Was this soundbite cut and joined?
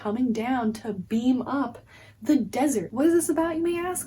yes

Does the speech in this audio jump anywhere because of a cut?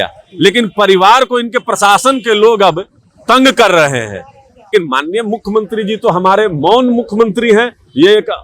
yes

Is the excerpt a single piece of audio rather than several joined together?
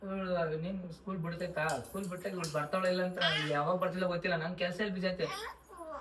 yes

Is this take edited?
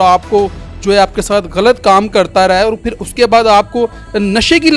no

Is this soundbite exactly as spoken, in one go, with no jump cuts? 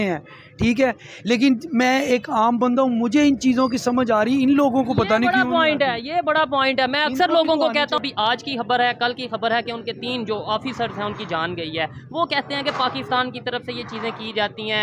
no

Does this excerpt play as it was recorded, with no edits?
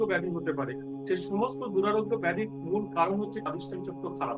no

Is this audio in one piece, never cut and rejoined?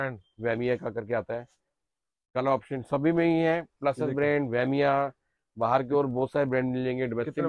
yes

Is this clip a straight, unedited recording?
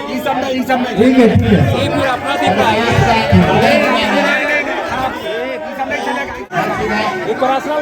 no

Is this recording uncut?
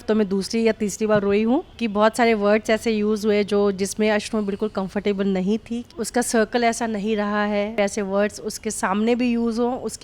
no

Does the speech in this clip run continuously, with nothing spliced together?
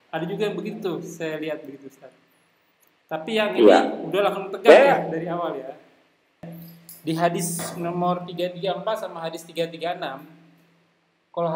no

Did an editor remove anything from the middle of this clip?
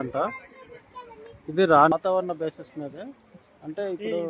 yes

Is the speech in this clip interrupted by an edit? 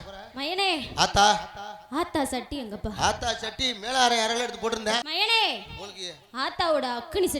yes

